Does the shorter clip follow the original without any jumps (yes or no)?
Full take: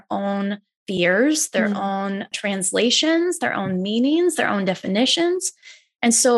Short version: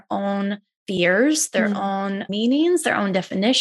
no